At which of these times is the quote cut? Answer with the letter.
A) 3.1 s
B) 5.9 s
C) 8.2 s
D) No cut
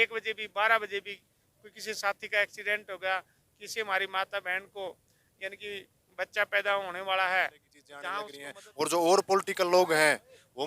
C